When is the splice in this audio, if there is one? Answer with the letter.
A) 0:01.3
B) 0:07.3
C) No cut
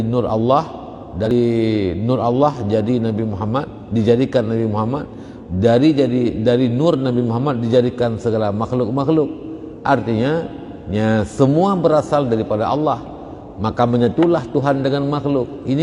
A